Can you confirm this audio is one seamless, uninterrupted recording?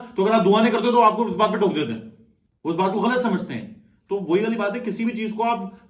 yes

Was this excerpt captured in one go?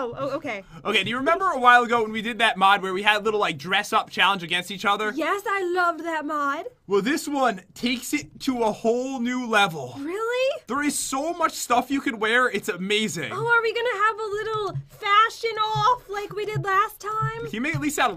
no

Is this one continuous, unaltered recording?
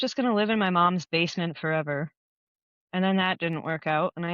yes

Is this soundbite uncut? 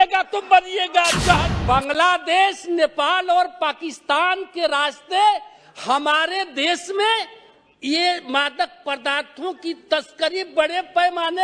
no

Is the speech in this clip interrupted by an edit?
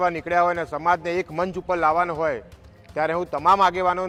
no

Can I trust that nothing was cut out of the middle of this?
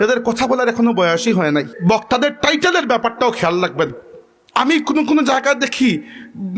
no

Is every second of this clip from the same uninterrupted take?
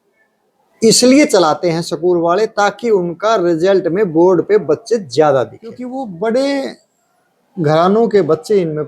no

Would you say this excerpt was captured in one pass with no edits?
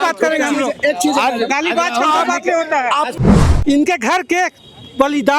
no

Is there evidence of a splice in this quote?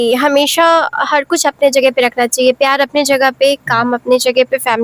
no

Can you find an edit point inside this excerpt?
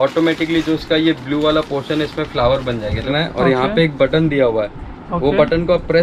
yes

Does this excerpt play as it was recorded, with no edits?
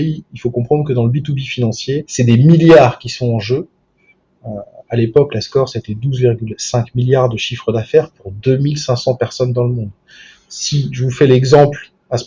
yes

